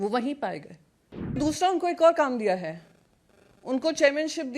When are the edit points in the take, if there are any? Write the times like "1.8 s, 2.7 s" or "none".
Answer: 1.4 s